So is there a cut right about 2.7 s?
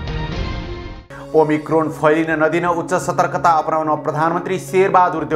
no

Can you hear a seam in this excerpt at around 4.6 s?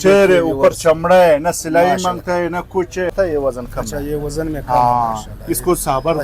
no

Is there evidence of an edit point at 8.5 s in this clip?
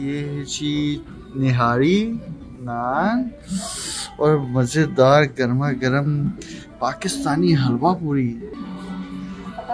yes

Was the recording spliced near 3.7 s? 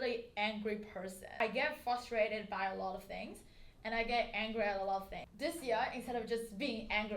no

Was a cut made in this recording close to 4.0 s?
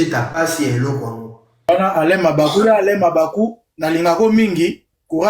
no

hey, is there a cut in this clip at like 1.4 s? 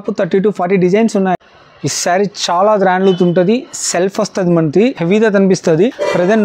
yes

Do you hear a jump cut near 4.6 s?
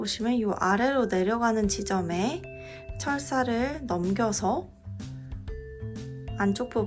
yes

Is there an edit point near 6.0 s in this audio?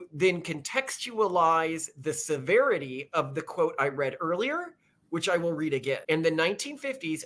yes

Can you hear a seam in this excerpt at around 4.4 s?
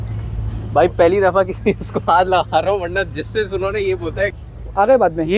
yes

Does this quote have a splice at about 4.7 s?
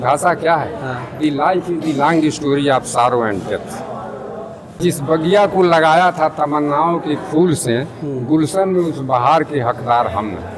yes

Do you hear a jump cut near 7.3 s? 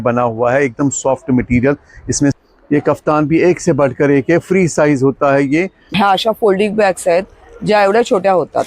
no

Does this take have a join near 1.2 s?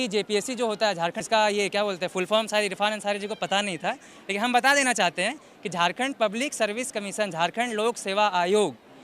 yes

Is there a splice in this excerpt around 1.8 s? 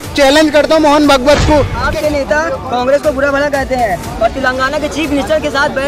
yes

